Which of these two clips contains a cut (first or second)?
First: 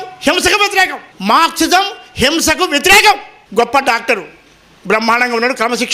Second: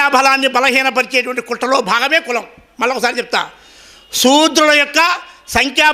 first